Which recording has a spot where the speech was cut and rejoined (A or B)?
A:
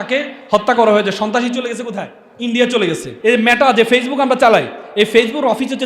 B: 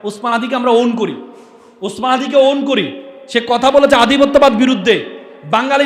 A